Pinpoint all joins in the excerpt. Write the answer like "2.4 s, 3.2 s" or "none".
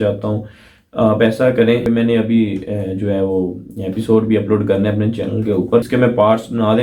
1.8 s, 5.9 s